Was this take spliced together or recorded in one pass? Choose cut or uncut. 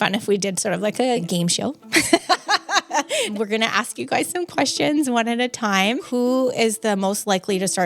cut